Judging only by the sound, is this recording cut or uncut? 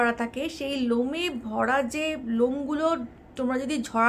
uncut